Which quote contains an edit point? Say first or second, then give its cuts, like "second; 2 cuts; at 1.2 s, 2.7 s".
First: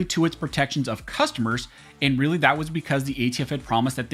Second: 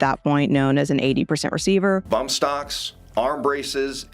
second; 1 cut; at 2.0 s